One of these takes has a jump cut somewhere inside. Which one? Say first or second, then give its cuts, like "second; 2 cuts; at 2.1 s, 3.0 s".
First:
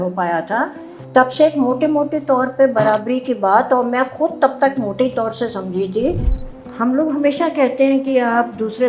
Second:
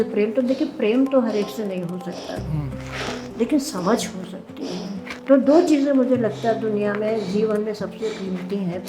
first; 1 cut; at 6.3 s